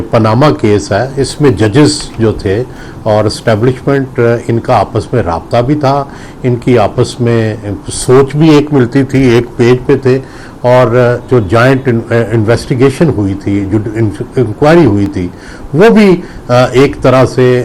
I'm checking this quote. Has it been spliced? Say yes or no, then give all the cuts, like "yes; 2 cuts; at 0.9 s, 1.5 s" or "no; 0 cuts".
no; 0 cuts